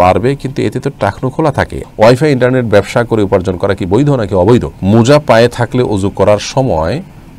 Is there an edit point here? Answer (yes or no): yes